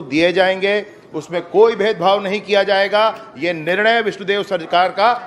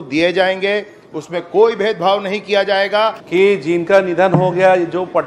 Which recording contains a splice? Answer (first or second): second